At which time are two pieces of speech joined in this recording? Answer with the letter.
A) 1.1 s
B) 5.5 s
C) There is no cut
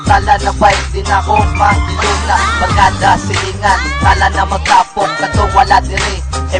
A